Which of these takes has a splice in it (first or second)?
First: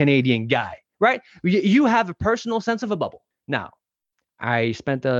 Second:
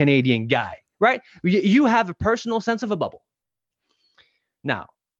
first